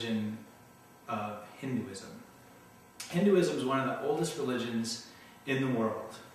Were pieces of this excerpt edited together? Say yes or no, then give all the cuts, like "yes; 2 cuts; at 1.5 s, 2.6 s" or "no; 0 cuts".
no; 0 cuts